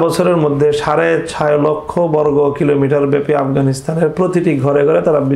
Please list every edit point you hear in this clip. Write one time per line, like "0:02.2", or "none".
none